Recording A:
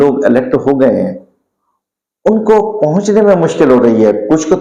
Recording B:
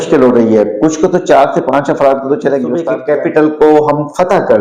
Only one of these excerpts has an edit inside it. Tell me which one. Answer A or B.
B